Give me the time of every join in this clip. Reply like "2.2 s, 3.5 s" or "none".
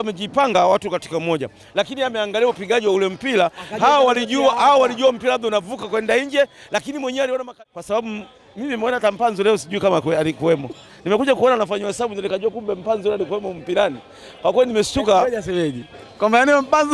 7.5 s